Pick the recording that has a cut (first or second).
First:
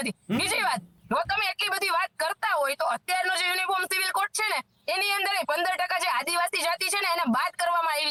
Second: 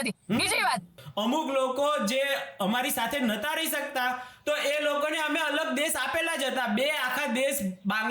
second